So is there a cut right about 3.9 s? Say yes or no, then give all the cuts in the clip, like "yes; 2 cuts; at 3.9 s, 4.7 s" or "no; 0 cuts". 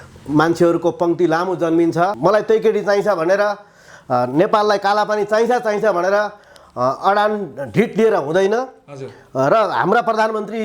no; 1 cut; at 2.1 s